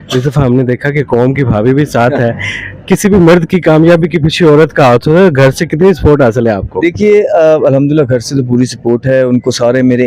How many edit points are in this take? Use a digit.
0